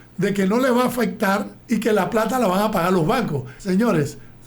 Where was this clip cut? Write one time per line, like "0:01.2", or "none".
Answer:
0:01.5
0:03.5